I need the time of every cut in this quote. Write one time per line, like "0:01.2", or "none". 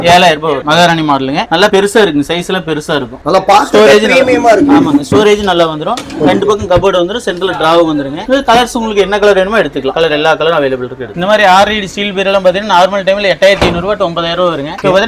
none

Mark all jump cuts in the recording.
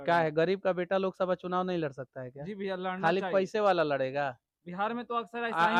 none

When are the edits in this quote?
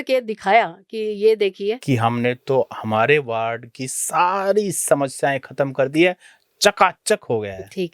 0:01.8

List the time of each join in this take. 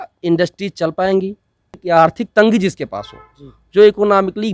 0:01.8

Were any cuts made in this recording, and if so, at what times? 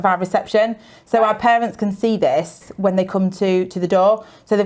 none

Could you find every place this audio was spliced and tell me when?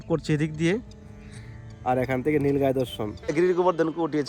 0:03.1

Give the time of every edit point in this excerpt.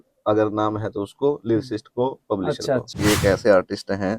0:03.0

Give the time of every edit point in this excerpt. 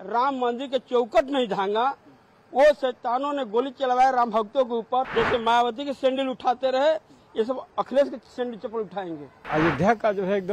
0:05.1
0:09.5

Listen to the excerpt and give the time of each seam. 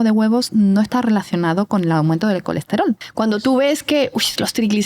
0:03.1

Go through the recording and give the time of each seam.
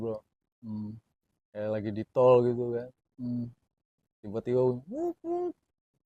none

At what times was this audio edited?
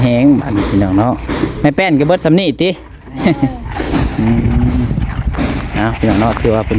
none

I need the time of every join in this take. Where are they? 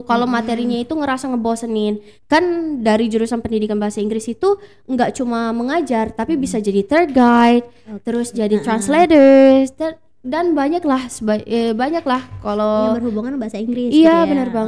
0:02.1

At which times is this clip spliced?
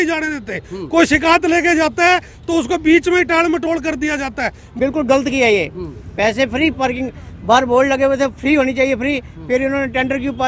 0:04.6

